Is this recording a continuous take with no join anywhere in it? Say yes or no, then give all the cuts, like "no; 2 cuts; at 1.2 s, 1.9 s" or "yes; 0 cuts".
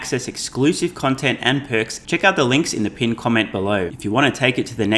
no; 2 cuts; at 2.0 s, 3.9 s